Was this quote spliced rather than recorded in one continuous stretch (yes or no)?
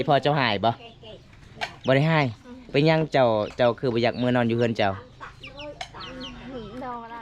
no